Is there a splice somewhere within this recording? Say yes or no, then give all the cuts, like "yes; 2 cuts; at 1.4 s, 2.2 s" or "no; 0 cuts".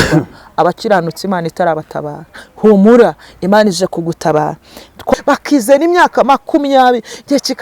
yes; 1 cut; at 5.1 s